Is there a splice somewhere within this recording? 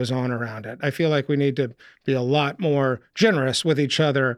no; 0 cuts

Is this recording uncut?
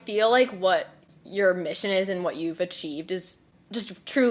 yes; 0 cuts

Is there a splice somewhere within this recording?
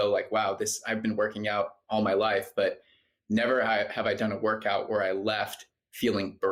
no; 0 cuts

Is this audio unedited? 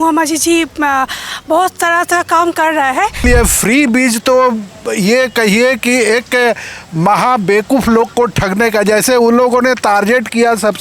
no; 1 cut; at 3.2 s

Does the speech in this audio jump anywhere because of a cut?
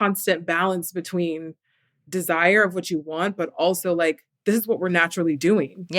no; 0 cuts

